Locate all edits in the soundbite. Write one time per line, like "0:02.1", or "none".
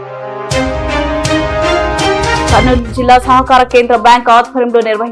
0:02.5